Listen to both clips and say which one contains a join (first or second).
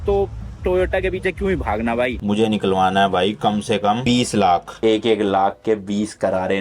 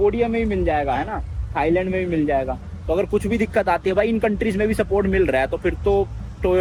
first